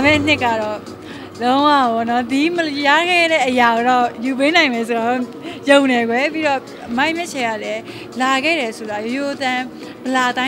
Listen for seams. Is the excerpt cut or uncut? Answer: uncut